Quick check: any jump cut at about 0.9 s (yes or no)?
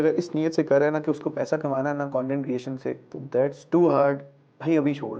no